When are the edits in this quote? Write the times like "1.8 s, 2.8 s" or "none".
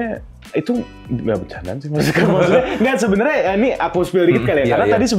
none